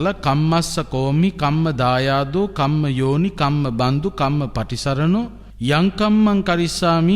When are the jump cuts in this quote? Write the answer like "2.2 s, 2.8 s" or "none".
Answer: 5.4 s